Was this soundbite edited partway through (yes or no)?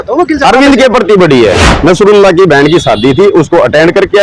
yes